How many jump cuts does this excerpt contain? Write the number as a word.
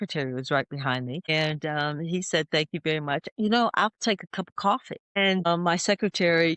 two